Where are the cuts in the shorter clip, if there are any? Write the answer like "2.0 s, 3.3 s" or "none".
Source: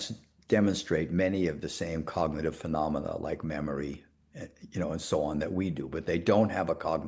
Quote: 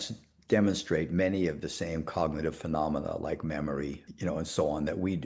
4.1 s